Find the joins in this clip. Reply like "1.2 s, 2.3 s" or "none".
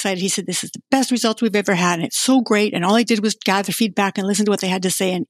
none